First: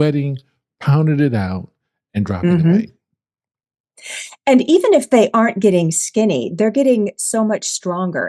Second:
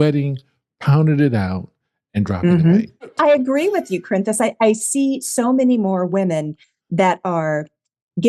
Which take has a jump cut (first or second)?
second